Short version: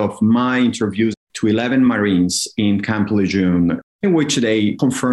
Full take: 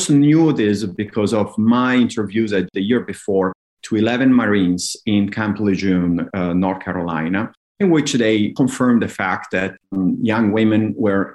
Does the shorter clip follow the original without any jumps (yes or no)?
no